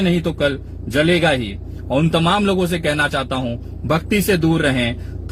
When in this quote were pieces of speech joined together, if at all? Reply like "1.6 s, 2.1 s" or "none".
none